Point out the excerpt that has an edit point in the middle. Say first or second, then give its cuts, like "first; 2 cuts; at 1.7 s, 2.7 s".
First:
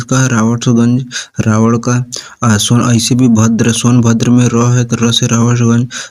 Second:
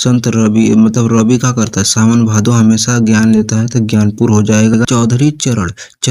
second; 1 cut; at 4.8 s